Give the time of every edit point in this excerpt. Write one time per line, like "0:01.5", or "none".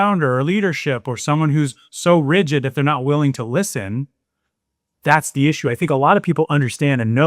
none